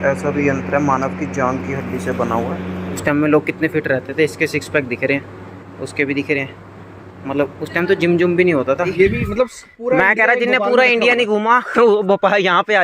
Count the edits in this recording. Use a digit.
2